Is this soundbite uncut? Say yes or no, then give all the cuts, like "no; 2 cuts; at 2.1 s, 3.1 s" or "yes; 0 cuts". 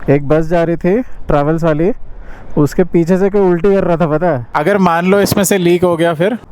no; 1 cut; at 4.5 s